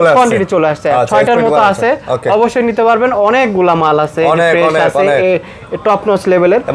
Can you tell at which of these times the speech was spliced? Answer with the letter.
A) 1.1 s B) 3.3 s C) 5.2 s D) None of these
D